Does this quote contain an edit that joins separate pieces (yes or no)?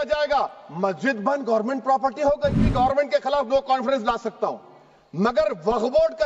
yes